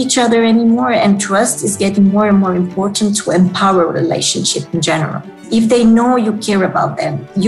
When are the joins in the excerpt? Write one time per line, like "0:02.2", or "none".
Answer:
0:05.4